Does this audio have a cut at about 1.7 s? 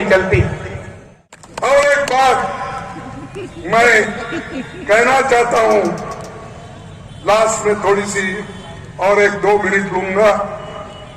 yes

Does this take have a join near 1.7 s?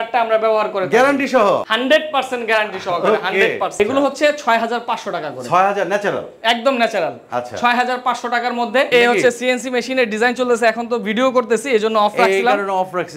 yes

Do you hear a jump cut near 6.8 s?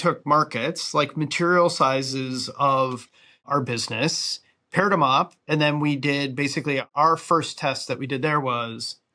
yes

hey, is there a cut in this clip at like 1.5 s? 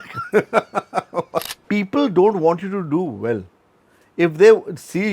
yes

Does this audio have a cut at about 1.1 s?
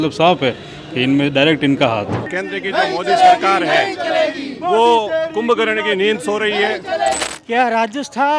no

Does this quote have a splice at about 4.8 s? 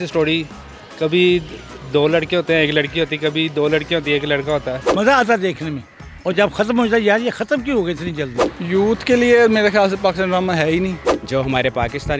yes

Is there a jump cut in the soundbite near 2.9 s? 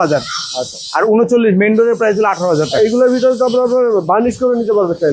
no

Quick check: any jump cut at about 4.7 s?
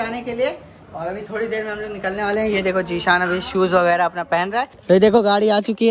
yes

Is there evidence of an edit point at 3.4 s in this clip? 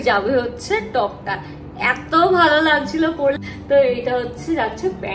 yes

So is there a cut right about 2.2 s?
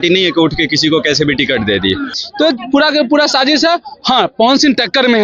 yes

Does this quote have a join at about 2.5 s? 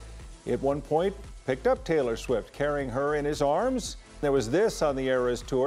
no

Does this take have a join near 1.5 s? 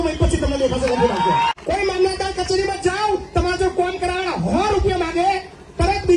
yes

